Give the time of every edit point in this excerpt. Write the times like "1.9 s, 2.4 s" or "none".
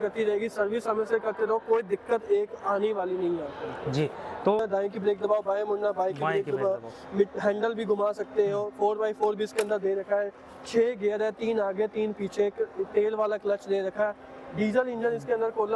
4.6 s